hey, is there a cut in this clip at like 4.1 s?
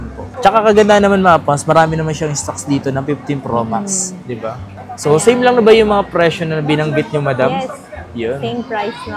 no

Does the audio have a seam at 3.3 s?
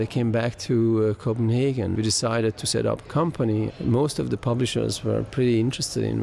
no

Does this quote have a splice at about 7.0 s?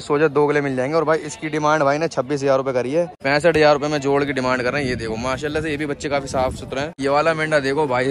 yes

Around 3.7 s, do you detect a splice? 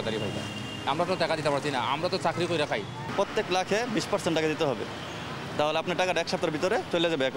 no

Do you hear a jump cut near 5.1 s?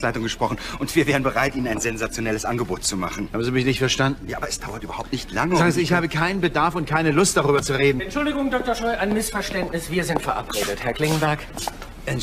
no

